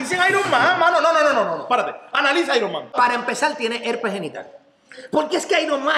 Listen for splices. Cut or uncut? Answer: cut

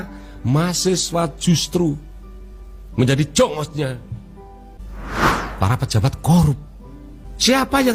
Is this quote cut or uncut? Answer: uncut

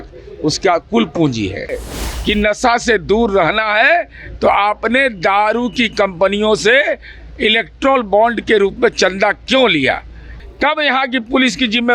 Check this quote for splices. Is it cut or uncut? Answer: cut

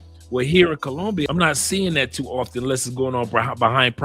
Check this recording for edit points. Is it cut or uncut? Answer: cut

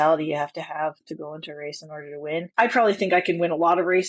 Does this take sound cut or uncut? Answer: cut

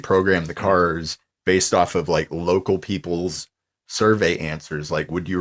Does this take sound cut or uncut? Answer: uncut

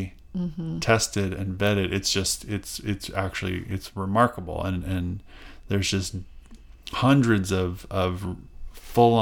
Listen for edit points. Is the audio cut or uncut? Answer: uncut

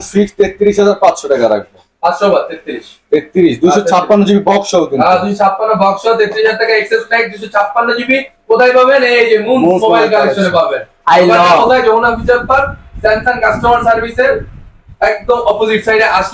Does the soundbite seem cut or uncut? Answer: uncut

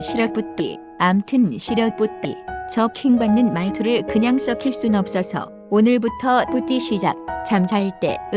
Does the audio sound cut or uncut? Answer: uncut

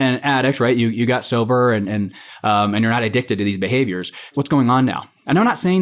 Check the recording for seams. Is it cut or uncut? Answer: cut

